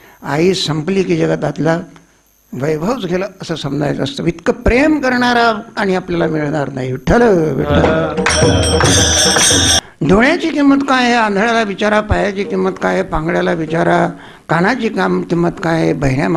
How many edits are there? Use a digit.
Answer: 1